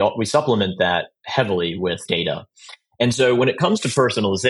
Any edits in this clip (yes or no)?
yes